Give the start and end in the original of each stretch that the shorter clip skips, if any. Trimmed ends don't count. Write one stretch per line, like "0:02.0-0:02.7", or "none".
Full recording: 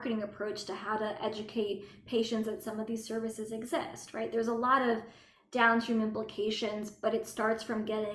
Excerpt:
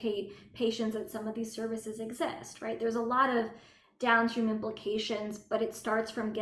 none